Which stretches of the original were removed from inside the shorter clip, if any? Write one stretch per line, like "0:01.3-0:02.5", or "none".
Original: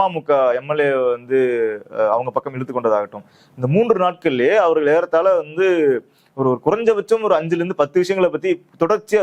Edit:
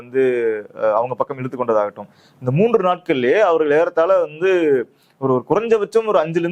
none